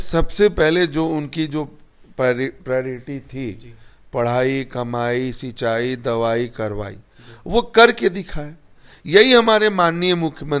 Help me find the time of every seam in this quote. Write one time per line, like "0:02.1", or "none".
none

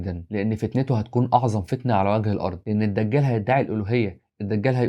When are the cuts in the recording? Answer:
0:02.6

